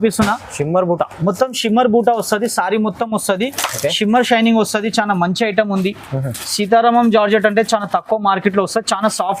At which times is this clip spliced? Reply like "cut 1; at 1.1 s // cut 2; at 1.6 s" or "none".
none